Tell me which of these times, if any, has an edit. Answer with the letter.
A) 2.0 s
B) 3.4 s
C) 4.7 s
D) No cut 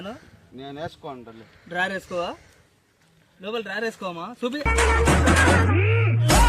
C